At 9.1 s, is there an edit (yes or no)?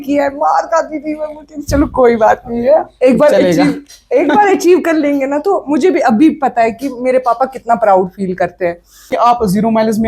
yes